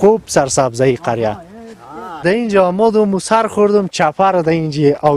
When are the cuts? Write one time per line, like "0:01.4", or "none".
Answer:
0:02.2